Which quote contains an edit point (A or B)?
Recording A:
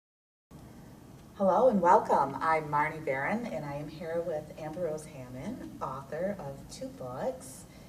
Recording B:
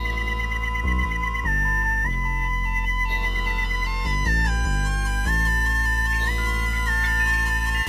A